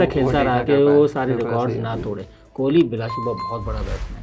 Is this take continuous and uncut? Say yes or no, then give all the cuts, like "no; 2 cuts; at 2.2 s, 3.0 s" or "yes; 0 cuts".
yes; 0 cuts